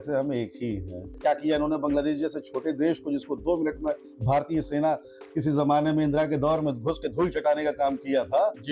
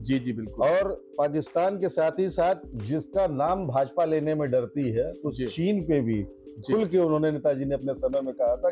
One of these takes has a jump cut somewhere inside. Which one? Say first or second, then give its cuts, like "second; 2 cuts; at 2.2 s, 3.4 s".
first; 1 cut; at 1.1 s